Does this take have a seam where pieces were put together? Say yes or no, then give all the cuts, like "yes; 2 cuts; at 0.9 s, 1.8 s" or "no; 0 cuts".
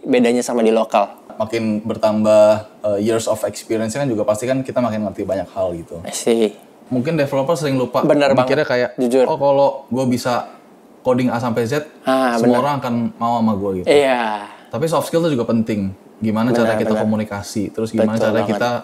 yes; 2 cuts; at 1.2 s, 6.7 s